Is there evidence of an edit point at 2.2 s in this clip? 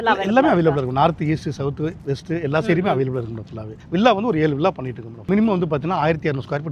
no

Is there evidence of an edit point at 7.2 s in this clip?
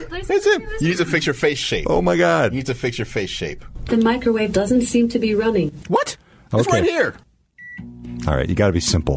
yes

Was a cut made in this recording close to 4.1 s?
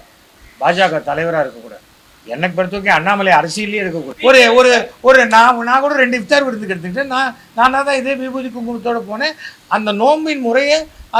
yes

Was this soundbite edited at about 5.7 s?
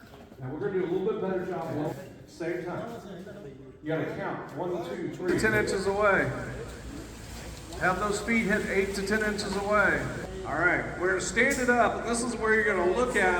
yes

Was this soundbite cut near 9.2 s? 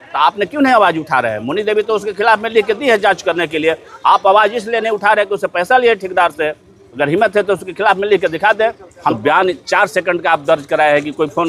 yes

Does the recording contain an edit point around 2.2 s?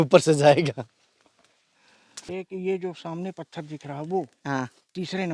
yes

